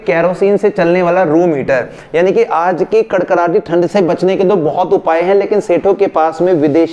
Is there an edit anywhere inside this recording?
no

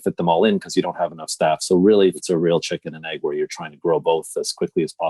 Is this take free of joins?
no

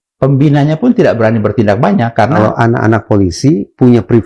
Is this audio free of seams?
no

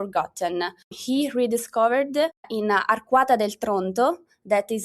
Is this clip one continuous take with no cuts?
no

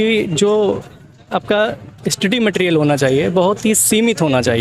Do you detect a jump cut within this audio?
no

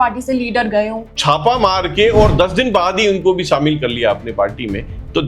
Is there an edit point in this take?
yes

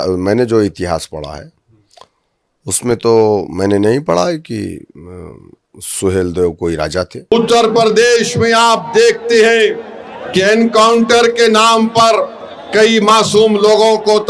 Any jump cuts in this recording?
yes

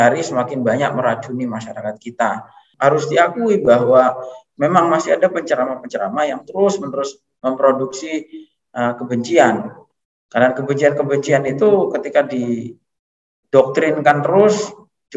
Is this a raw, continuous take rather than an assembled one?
no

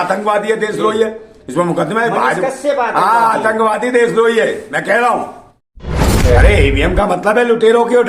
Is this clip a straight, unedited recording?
no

